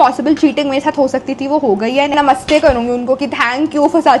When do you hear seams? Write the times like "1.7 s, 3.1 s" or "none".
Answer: 2.1 s